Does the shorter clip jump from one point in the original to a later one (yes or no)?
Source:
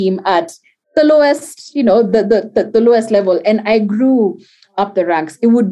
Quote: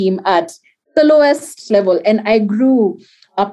yes